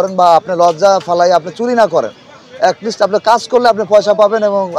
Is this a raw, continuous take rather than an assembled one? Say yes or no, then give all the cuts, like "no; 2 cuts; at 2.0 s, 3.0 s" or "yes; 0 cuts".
yes; 0 cuts